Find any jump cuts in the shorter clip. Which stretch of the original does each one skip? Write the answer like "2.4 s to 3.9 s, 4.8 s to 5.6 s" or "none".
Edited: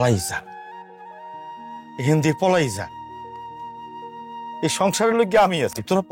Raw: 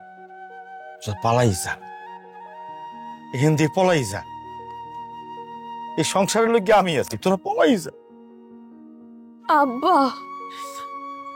none